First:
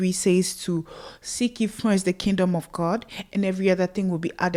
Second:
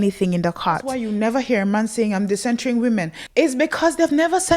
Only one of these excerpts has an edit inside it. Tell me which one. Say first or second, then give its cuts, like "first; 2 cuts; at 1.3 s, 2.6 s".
second; 2 cuts; at 0.9 s, 3.2 s